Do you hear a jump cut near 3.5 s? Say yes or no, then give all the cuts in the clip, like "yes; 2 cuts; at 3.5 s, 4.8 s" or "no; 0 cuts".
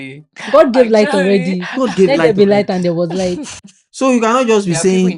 no; 0 cuts